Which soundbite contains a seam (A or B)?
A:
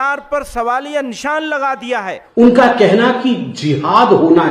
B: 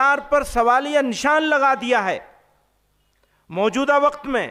A